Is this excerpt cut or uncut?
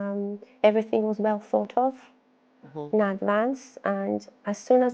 uncut